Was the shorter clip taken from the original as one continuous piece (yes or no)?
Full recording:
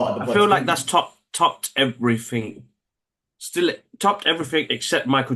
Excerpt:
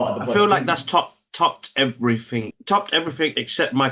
no